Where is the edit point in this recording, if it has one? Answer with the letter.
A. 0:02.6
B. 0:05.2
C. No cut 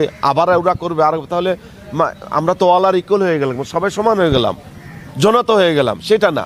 C